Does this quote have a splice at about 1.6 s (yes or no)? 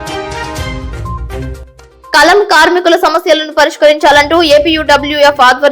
yes